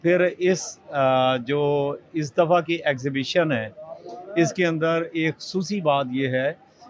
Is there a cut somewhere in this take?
no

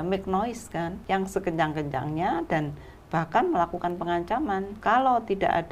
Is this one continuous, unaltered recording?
no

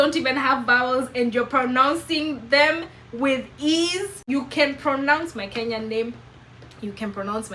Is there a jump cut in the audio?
no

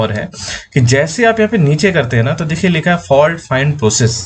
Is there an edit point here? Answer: no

